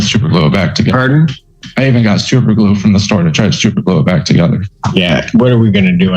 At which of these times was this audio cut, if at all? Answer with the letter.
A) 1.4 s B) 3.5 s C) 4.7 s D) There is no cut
C